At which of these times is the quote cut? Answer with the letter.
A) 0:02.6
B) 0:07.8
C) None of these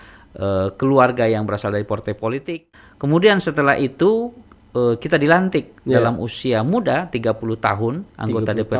A